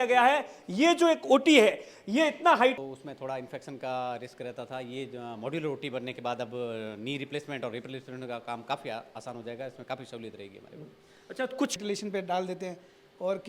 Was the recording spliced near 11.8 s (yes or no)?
yes